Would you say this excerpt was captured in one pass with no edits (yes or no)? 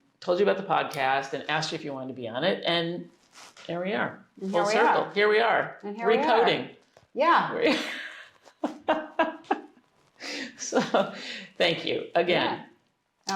yes